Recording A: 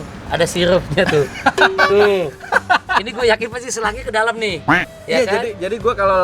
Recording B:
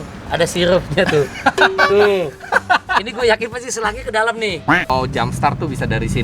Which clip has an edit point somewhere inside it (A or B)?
B